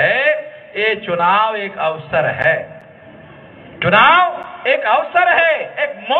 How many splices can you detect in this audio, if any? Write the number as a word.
zero